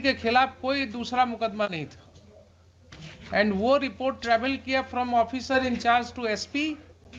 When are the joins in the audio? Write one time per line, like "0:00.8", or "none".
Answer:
none